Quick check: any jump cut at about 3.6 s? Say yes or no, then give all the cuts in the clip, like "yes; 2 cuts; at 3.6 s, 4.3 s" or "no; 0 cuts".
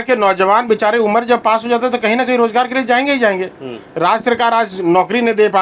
no; 0 cuts